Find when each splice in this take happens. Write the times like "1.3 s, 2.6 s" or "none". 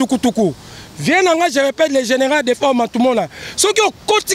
none